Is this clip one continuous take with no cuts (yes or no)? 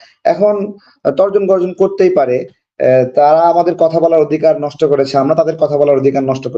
yes